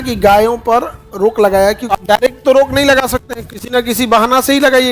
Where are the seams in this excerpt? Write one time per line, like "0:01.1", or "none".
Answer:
0:01.8